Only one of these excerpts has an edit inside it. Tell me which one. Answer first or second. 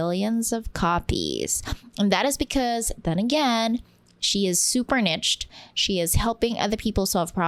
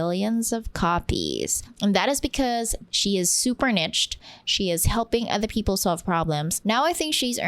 second